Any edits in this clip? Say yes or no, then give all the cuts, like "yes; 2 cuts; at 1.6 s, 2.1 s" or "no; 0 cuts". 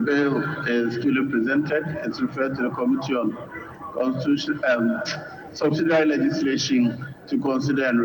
no; 0 cuts